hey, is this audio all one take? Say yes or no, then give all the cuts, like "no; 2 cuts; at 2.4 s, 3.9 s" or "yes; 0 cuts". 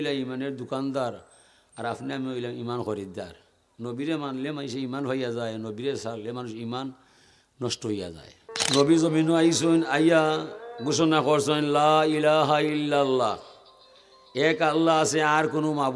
no; 1 cut; at 8.5 s